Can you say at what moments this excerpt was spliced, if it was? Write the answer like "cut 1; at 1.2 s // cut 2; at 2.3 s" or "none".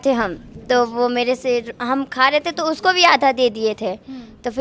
none